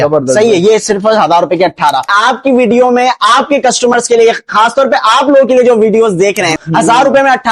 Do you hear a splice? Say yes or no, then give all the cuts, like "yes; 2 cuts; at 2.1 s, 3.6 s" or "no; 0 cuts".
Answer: yes; 2 cuts; at 2.1 s, 6.6 s